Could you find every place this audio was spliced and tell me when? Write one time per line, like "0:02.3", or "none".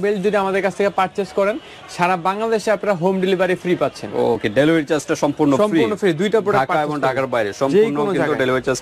none

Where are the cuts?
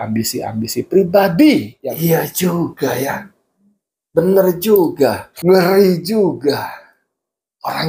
0:02.0
0:05.3

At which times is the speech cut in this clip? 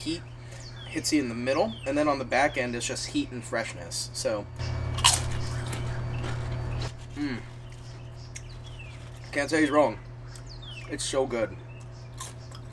none

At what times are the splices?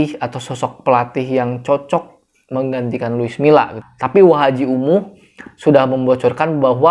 0:03.8

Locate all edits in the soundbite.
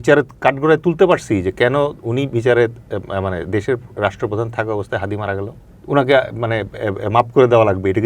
0:05.7

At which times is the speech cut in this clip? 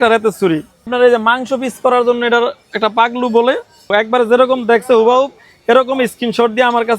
0:00.9
0:03.9

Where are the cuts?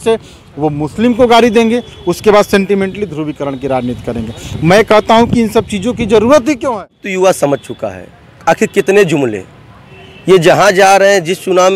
0:07.0

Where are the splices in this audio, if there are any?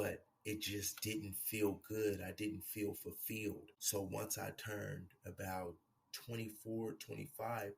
0:03.7

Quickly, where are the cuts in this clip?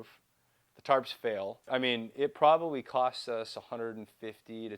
0:01.7

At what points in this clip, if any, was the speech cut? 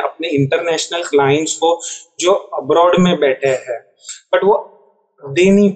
0:04.1

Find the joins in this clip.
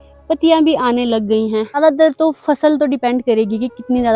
0:01.8

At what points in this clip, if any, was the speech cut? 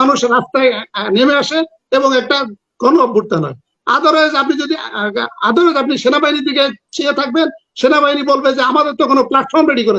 none

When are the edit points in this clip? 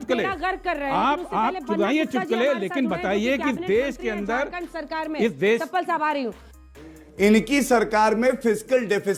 none

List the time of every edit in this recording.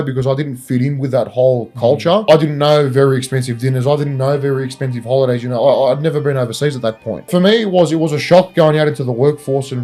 0:02.3
0:07.3

